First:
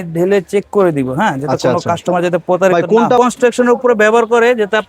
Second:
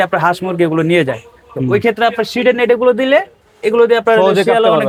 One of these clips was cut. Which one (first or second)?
first